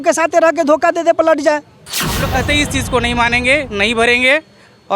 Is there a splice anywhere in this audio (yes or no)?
yes